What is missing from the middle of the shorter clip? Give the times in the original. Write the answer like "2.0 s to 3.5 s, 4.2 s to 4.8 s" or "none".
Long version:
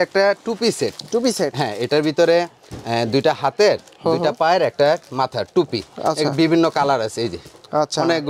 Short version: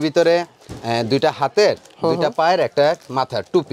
none